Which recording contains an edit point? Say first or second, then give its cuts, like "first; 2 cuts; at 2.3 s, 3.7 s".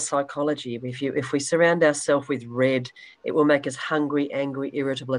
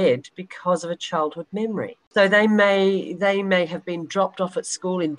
second; 1 cut; at 2.0 s